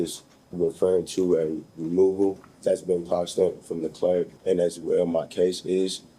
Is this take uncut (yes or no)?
no